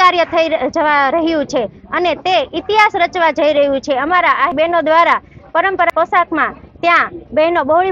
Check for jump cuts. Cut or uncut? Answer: uncut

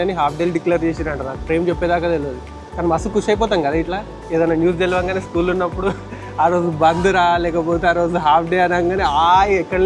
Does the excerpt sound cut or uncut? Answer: uncut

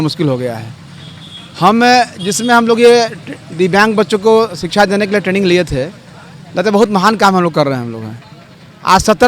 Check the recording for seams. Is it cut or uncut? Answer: uncut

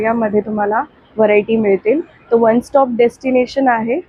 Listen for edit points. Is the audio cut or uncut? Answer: uncut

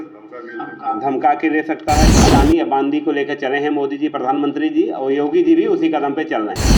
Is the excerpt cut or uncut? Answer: cut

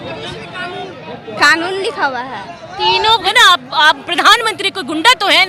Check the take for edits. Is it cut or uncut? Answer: cut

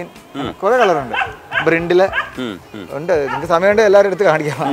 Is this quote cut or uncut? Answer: uncut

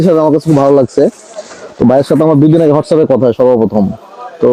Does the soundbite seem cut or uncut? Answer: uncut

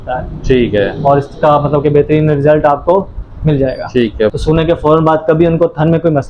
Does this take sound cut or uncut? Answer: cut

